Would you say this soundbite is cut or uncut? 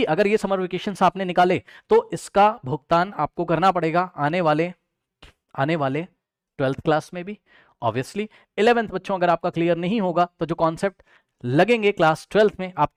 uncut